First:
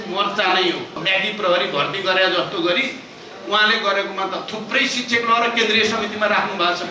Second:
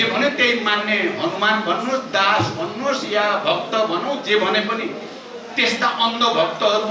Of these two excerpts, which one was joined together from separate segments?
first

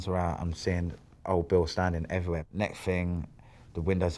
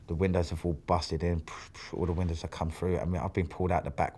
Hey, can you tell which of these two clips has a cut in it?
first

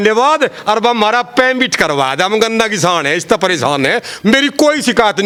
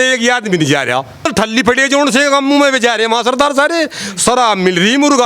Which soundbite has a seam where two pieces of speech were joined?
second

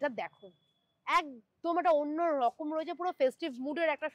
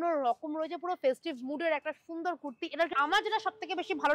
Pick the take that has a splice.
second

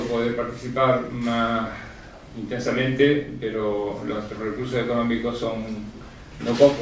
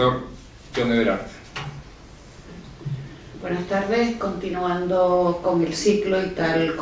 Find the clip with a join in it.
second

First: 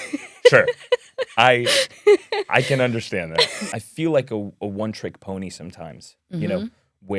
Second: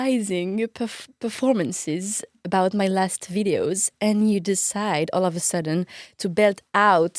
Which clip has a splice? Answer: first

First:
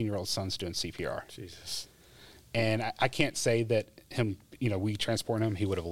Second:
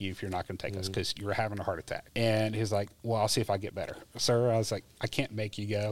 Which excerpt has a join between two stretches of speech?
second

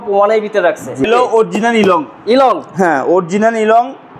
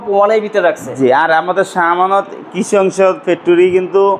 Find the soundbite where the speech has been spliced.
first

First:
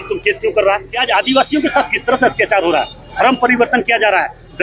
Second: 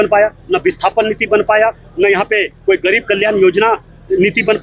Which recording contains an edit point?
first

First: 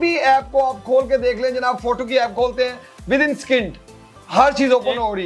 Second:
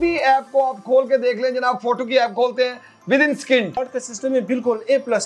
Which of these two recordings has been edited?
second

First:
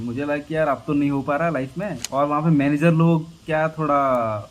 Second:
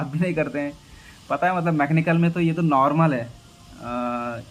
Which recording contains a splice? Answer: first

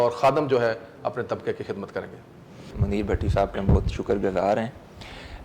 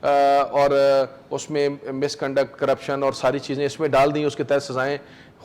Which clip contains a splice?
first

